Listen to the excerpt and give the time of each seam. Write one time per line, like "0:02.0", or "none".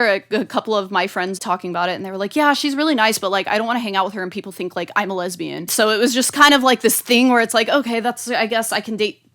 0:01.4
0:05.7